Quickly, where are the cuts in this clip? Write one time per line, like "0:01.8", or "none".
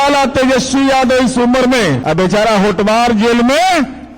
0:02.0